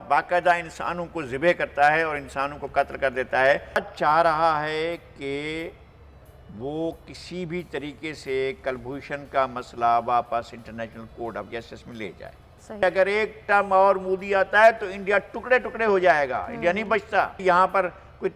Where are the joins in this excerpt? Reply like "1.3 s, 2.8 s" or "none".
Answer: 3.8 s, 12.8 s, 17.4 s